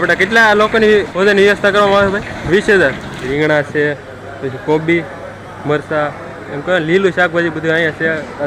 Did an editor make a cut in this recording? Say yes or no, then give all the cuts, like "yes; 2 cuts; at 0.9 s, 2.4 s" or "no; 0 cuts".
yes; 3 cuts; at 1.1 s, 2.4 s, 3.3 s